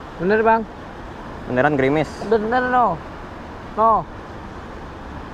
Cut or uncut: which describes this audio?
uncut